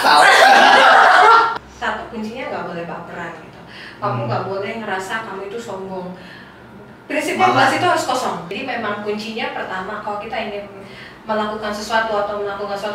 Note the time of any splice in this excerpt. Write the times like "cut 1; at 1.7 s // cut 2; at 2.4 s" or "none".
cut 1; at 1.6 s // cut 2; at 8.5 s